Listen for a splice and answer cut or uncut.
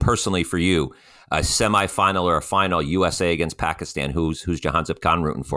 uncut